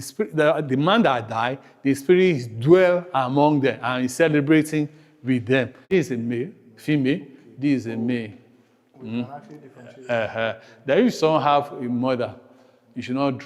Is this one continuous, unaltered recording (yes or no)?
no